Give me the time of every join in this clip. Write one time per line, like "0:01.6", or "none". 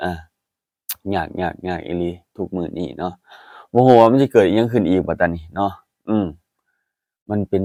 none